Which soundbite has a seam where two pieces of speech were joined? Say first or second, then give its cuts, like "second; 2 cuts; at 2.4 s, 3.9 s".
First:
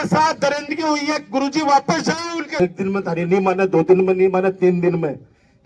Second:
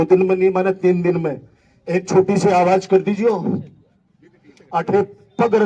first; 1 cut; at 2.6 s